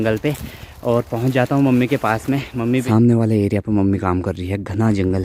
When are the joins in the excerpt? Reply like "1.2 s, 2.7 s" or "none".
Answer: 2.8 s